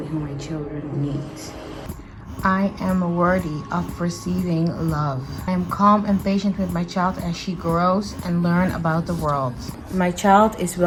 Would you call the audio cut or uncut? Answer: uncut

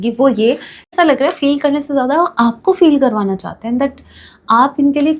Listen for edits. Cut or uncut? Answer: cut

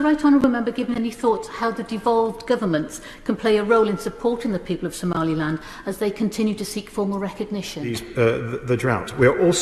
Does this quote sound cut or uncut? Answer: cut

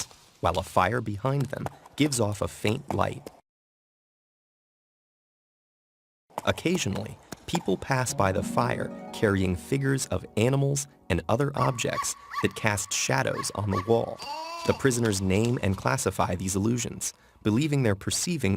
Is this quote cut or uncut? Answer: uncut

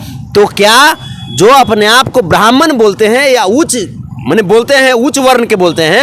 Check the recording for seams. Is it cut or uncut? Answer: uncut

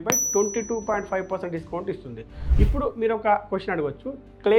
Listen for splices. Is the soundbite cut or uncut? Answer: cut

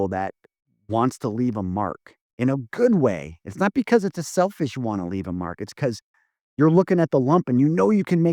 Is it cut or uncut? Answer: uncut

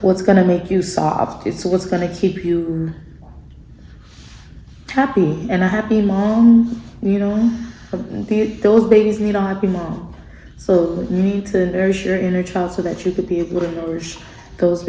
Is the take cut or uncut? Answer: uncut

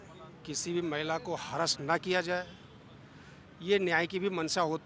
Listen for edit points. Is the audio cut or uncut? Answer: uncut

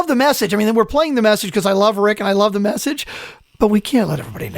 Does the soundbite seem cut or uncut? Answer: cut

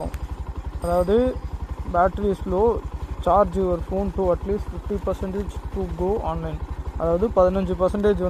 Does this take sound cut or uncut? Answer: uncut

